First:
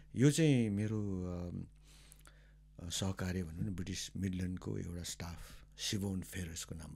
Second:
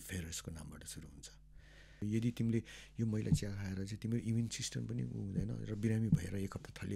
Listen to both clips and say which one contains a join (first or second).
second